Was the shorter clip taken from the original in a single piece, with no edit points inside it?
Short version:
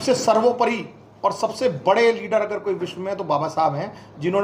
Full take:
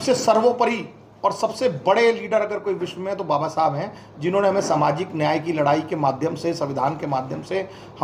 yes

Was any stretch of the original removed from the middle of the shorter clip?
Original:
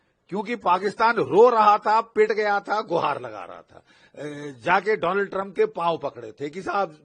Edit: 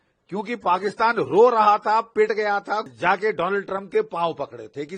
yes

